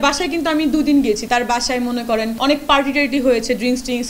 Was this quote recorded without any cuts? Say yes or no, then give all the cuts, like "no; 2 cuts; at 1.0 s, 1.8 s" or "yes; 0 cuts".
no; 2 cuts; at 1.2 s, 2.4 s